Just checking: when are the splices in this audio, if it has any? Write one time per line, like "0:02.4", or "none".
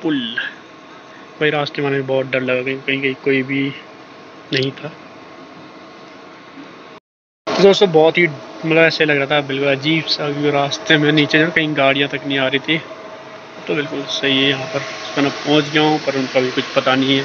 none

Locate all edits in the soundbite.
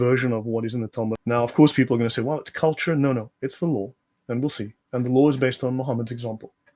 0:01.1

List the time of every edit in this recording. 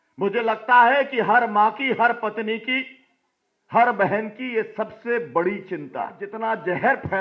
0:06.3

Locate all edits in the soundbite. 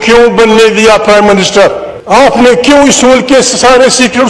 0:01.9

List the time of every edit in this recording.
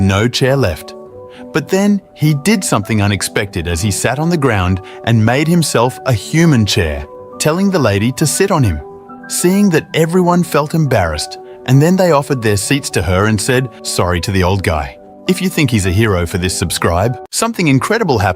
0:17.3

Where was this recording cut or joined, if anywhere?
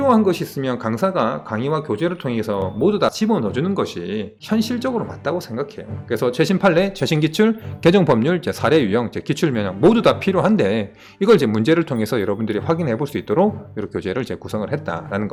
none

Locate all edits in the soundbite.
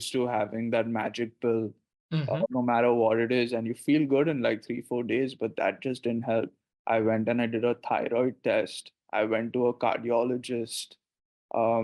0:02.5

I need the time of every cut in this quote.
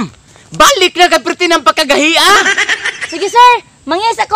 0:02.4

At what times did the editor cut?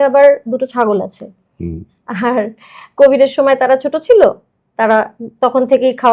none

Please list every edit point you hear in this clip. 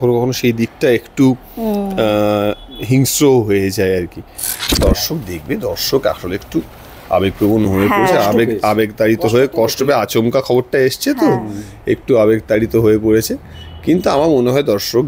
0:04.5

